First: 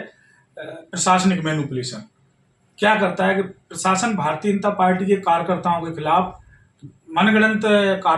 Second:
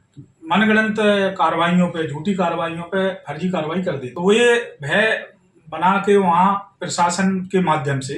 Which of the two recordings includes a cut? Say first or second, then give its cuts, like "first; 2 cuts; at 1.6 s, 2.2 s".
second; 1 cut; at 4.1 s